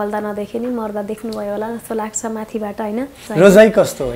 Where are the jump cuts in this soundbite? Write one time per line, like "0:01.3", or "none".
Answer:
0:03.2